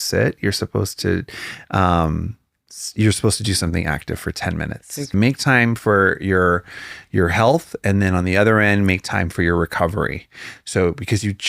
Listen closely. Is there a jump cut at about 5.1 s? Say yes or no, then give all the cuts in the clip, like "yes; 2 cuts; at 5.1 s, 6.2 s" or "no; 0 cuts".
yes; 1 cut; at 5.1 s